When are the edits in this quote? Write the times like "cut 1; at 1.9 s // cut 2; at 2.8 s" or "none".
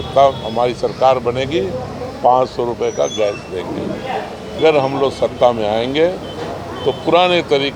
cut 1; at 4.6 s